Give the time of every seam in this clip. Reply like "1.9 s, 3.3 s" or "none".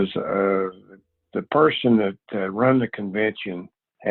none